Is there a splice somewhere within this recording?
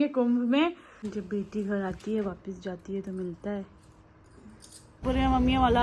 yes; 2 cuts; at 1.1 s, 5.0 s

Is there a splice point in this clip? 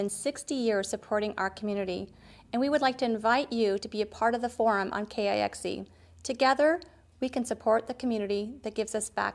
no; 0 cuts

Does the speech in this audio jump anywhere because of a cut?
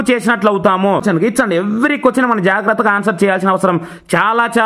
yes; 1 cut; at 1.0 s

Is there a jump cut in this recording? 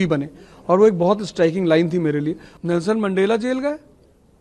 yes; 1 cut; at 2.5 s

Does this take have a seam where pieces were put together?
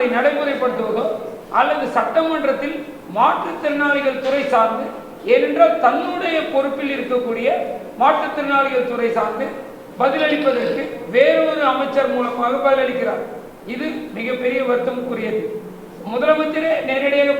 no; 0 cuts

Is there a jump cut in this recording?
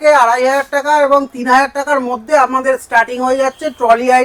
no; 0 cuts

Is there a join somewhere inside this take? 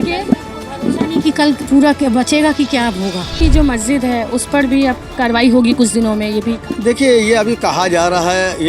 yes; 2 cuts; at 3.3 s, 6.7 s

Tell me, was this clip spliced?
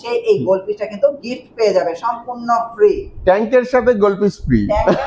no; 0 cuts

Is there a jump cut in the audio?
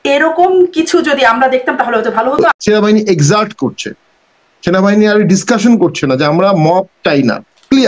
yes; 1 cut; at 2.6 s

